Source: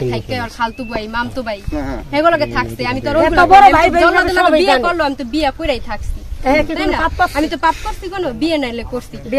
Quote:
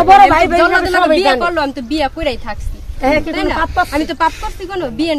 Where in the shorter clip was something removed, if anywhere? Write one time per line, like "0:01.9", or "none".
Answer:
none